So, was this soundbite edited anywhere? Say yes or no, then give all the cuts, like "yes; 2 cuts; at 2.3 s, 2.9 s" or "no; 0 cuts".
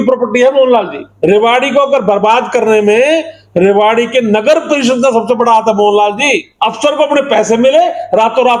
yes; 2 cuts; at 1.0 s, 6.5 s